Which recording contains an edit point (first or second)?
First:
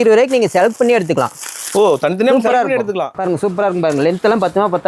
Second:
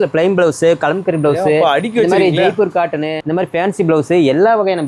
first